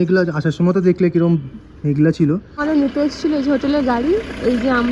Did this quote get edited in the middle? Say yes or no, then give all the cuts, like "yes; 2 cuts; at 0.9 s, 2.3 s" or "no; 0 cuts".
yes; 1 cut; at 2.5 s